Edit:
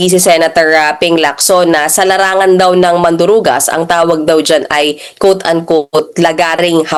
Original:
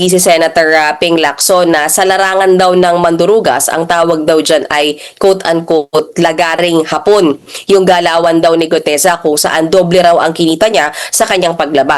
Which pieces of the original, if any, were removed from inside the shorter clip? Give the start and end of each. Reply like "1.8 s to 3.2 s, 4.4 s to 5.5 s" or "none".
none